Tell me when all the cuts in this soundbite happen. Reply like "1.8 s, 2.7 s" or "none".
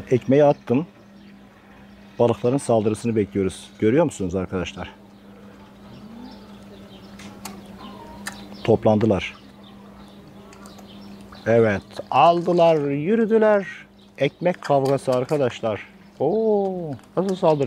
none